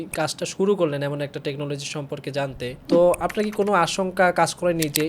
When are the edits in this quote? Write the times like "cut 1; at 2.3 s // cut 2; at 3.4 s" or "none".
cut 1; at 2.8 s